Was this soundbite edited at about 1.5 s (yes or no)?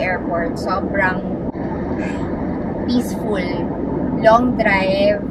yes